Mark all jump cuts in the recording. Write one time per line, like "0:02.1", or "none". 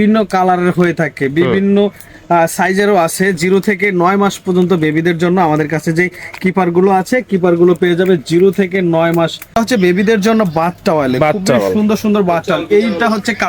0:09.5

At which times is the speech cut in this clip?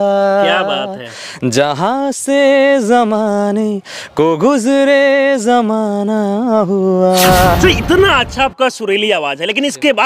0:07.5

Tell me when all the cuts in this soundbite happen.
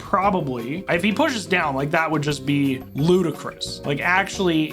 0:00.8
0:02.9

